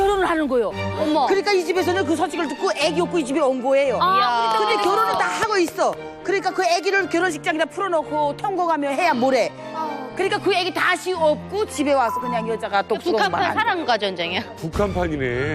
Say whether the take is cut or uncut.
uncut